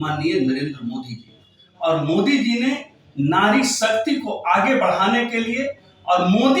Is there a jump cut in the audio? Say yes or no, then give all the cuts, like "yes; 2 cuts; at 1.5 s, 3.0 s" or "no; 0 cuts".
no; 0 cuts